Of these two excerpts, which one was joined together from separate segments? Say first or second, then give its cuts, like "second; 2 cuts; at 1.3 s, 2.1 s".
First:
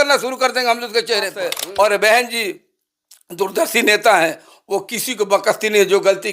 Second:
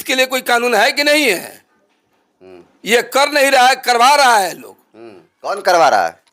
first; 1 cut; at 1.6 s